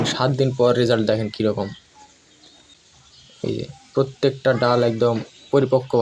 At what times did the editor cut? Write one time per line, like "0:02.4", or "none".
0:02.7